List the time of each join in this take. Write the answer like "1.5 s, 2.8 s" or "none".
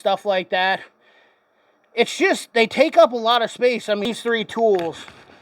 4.1 s